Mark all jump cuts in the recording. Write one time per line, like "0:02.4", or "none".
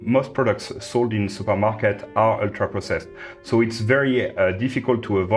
none